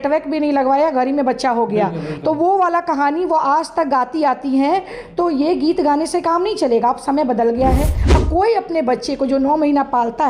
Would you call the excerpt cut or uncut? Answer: cut